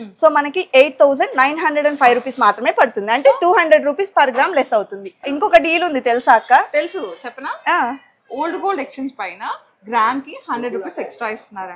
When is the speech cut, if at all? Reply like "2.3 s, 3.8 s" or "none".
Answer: 5.2 s